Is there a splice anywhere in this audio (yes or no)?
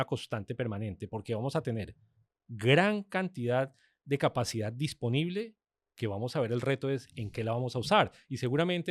no